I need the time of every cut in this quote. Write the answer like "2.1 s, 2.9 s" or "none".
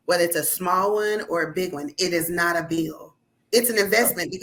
none